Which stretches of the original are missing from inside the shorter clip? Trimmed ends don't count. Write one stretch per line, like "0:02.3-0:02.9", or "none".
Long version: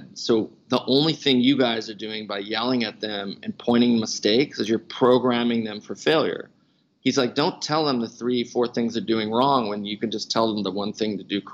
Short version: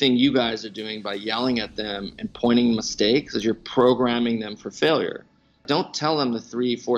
0:06.9-0:07.3